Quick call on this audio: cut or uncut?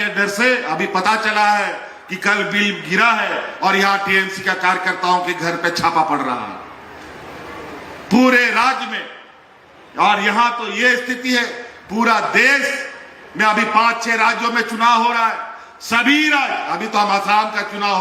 uncut